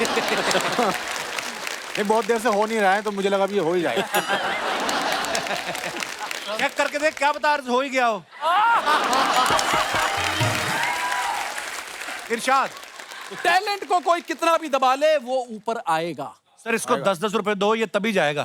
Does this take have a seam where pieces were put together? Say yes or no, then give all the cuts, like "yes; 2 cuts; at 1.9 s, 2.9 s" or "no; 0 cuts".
no; 0 cuts